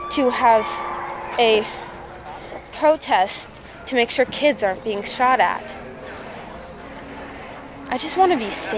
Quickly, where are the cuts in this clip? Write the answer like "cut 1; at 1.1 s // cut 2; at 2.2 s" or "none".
cut 1; at 6.9 s